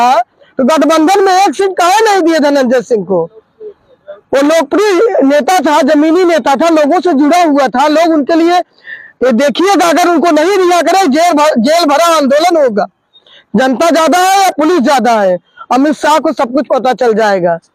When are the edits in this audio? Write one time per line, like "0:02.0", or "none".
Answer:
none